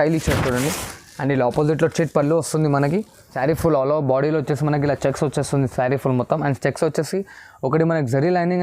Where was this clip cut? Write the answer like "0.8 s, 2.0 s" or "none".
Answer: 3.3 s